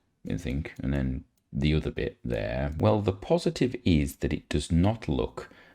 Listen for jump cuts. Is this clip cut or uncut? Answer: cut